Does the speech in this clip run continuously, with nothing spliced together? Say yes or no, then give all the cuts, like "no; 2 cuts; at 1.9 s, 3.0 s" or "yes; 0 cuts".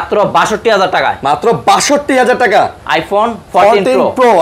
yes; 0 cuts